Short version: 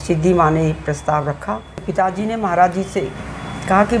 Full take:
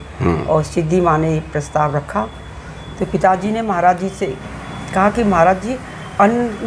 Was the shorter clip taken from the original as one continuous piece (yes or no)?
no